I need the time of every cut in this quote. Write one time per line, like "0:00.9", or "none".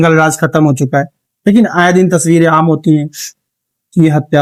none

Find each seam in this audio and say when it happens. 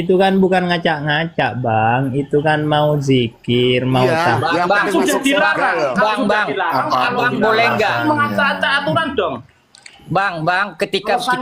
none

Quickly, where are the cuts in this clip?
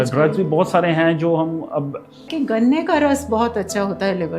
0:02.3

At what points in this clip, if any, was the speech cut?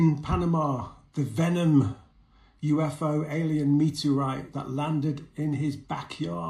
none

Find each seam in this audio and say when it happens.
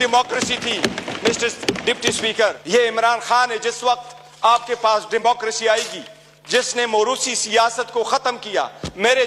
0:02.6

